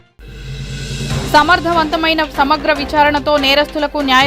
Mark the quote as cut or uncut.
cut